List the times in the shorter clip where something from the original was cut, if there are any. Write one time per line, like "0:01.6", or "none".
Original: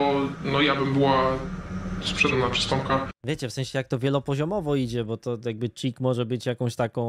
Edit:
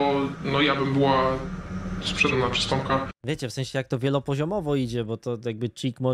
none